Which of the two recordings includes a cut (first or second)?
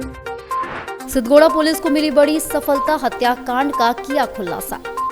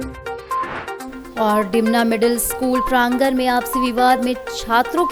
first